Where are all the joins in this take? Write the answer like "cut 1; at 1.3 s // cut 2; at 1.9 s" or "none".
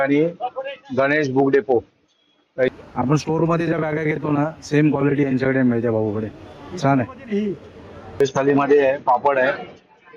cut 1; at 2.7 s // cut 2; at 8.2 s